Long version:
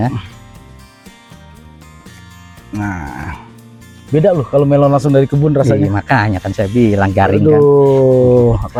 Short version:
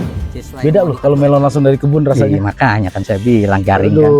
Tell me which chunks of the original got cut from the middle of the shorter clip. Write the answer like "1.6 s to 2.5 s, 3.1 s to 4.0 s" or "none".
none